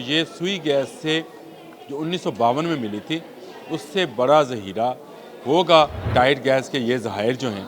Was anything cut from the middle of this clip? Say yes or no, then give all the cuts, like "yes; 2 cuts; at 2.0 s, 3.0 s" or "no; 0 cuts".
yes; 1 cut; at 6.1 s